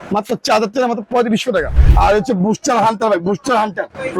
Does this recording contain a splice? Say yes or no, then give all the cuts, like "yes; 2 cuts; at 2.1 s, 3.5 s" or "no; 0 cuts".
yes; 1 cut; at 1.7 s